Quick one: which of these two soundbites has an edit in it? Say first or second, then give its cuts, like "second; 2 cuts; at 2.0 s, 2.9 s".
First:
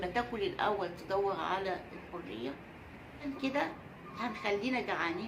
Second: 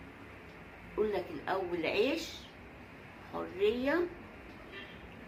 first; 1 cut; at 3.2 s